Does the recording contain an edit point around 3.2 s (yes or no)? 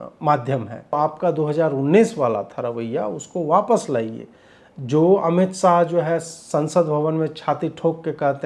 no